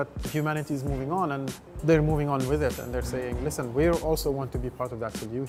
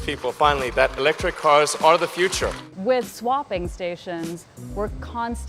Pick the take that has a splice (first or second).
second